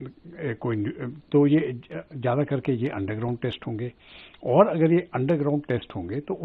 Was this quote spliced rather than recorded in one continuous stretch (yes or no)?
no